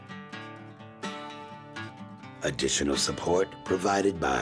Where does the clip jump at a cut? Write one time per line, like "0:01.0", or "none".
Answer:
0:01.4